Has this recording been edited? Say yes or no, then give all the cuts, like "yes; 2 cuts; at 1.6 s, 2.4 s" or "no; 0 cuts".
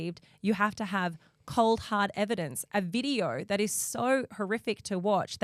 no; 0 cuts